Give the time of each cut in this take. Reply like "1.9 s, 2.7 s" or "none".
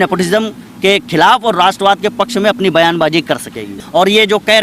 3.7 s